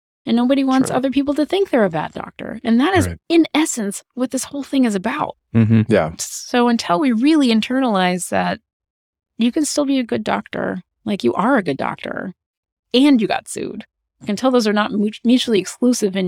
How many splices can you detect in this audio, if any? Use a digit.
0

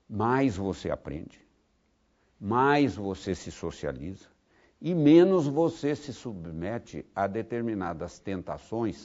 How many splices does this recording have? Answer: 0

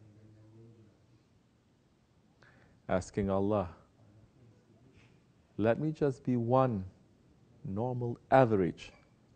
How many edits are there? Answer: 1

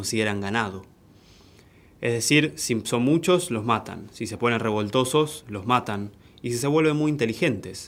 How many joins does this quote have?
0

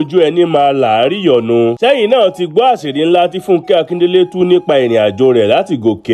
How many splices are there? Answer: 0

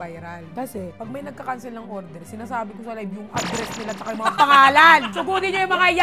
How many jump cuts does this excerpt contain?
0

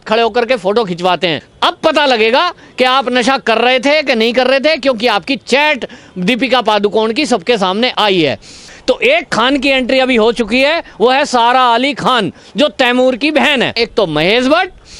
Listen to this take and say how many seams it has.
3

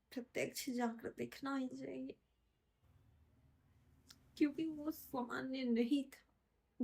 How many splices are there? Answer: 1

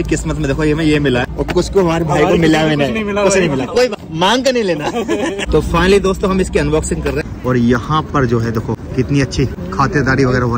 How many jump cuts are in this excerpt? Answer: 6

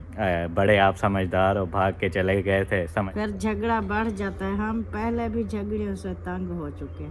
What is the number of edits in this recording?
1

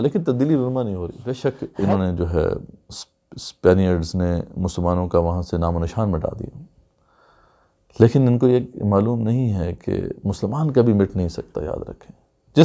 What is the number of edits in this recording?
1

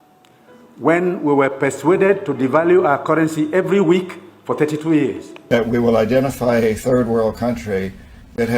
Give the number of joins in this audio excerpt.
1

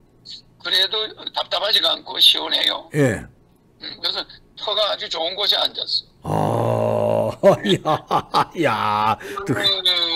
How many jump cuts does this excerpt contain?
0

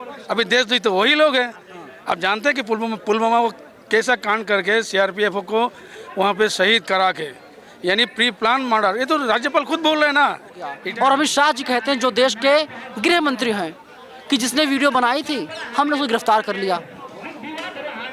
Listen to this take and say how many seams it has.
1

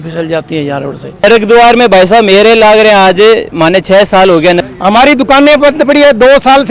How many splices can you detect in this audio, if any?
2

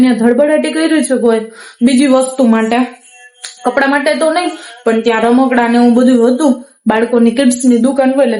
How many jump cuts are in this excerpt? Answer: 0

